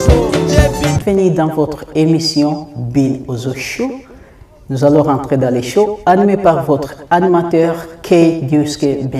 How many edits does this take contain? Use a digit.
0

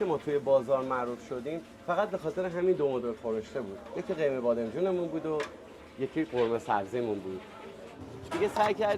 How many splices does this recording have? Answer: 1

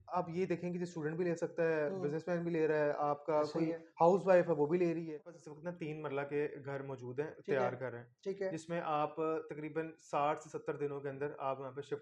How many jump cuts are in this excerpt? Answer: 1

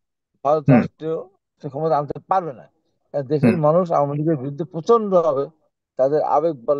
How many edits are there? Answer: 1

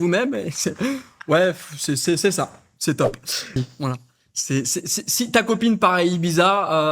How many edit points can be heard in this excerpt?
1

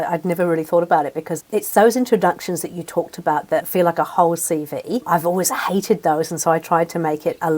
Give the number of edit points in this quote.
3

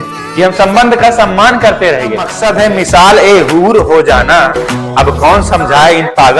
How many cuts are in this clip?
1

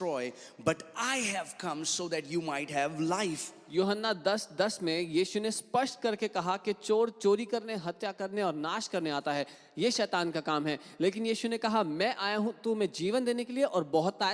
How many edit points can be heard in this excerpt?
0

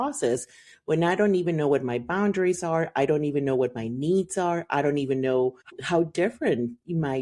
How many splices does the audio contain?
1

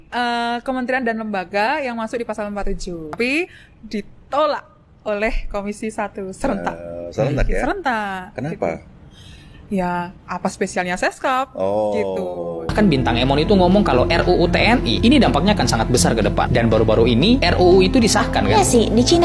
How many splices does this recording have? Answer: 2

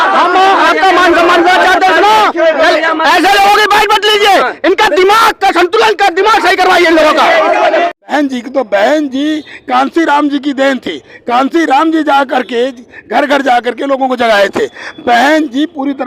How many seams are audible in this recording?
1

